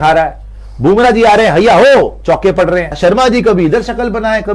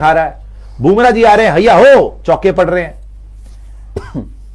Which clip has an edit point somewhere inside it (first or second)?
first